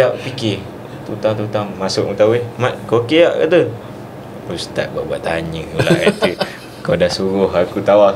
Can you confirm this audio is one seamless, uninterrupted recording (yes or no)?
yes